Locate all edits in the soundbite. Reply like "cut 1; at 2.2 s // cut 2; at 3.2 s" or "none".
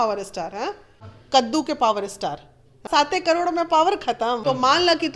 cut 1; at 1.1 s // cut 2; at 2.9 s // cut 3; at 4.4 s

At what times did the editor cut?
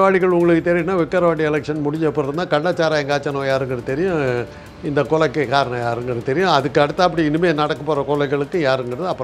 none

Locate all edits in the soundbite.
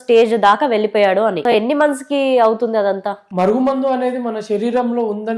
cut 1; at 1.4 s // cut 2; at 3.2 s

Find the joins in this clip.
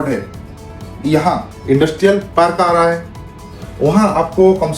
cut 1; at 1.5 s // cut 2; at 2.3 s

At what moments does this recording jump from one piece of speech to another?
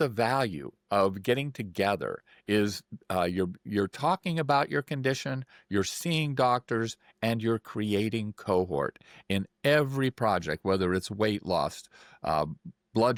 none

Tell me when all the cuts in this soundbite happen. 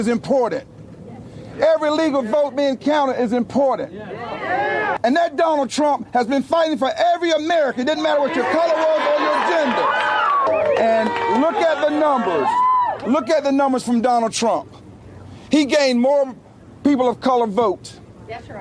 cut 1; at 5.0 s // cut 2; at 10.5 s

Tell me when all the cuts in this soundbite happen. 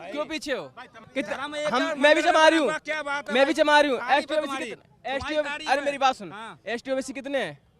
cut 1; at 0.9 s

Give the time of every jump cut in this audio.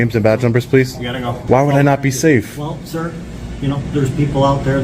cut 1; at 1.3 s

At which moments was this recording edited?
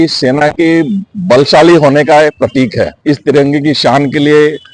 cut 1; at 2.9 s

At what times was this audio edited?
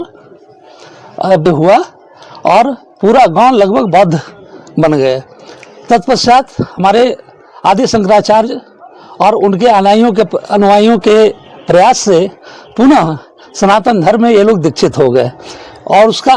cut 1; at 1.5 s

